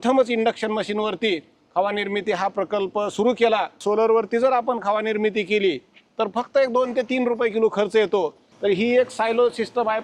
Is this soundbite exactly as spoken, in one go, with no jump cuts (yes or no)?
no